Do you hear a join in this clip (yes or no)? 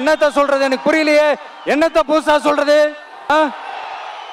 yes